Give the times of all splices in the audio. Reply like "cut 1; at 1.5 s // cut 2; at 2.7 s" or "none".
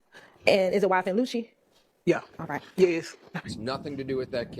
cut 1; at 3.5 s